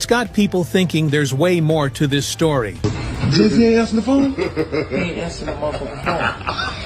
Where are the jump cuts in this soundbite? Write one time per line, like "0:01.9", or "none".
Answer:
0:02.7